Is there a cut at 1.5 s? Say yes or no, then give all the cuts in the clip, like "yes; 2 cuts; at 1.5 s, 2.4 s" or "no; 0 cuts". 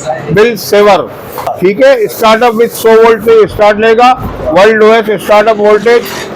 yes; 1 cut; at 1.5 s